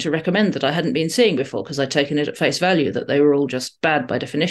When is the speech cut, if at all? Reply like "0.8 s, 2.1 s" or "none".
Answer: none